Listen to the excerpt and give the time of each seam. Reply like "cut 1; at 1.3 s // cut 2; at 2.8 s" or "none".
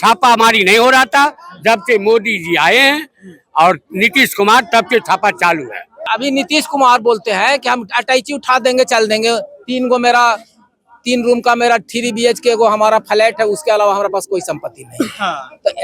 cut 1; at 6.0 s